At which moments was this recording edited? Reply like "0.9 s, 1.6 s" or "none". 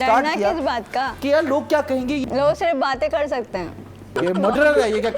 1.1 s, 2.2 s, 4.1 s